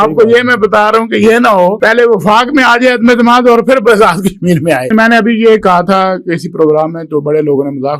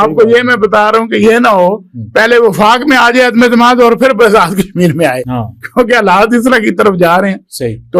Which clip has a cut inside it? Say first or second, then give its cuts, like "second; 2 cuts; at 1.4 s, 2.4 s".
first; 2 cuts; at 1.8 s, 4.9 s